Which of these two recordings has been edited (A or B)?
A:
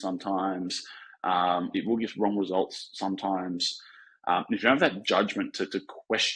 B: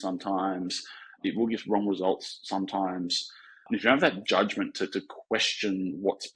B